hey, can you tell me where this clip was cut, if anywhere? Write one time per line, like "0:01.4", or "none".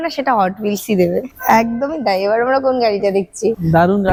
none